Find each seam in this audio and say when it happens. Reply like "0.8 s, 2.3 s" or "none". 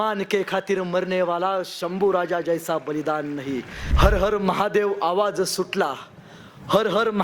3.8 s